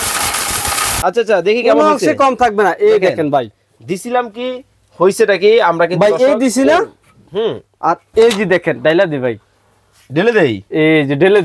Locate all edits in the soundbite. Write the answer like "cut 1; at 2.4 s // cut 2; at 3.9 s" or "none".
cut 1; at 0.9 s